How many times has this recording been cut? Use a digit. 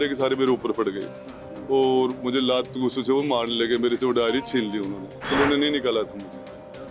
1